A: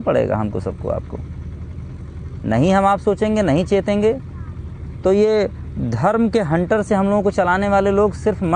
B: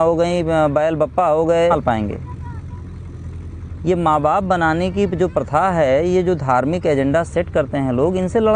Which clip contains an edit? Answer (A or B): B